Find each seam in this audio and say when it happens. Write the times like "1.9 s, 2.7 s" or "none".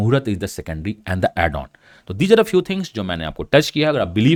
none

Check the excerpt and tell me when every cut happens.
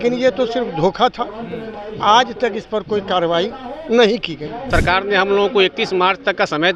4.6 s

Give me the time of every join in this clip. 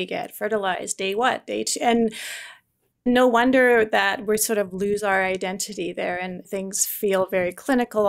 6.4 s

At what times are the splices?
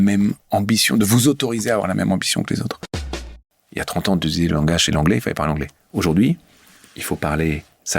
3.2 s

